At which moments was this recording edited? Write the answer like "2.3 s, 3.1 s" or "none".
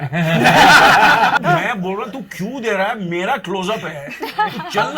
1.4 s